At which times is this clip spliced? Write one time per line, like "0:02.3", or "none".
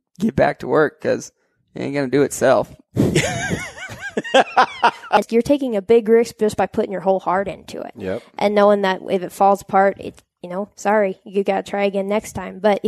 0:05.3